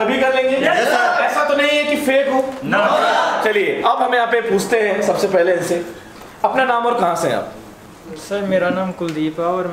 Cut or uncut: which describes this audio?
uncut